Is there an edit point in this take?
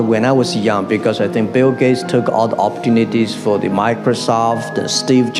no; 0 cuts

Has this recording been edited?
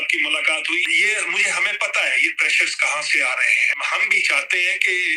yes; 2 cuts; at 0.9 s, 3.6 s

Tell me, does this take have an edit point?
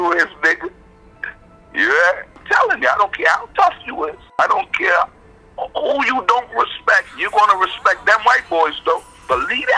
yes; 2 cuts; at 2.4 s, 4.4 s

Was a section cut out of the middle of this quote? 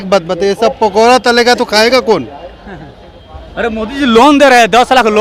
no; 0 cuts

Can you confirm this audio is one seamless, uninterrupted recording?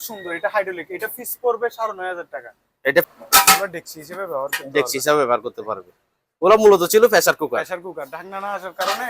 no; 1 cut; at 3.0 s

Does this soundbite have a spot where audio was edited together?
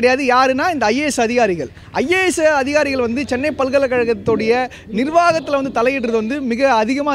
no; 0 cuts

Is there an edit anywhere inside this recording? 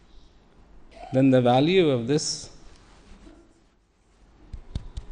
yes; 1 cut; at 0.9 s

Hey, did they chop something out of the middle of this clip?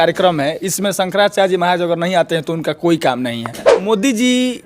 yes; 1 cut; at 3.8 s

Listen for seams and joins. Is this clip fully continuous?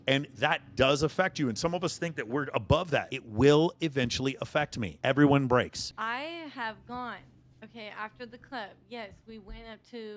no; 2 cuts; at 3.2 s, 5.9 s

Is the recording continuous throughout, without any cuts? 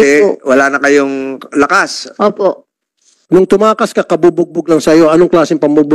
no; 1 cut; at 3.2 s

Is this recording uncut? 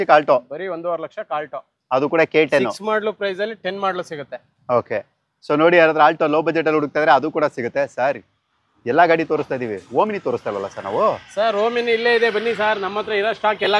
yes; 0 cuts

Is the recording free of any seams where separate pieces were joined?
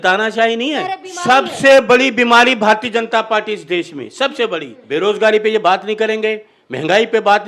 no; 2 cuts; at 1.1 s, 4.7 s

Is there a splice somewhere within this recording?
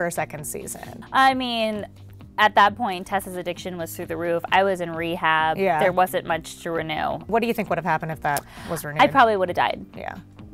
no; 0 cuts

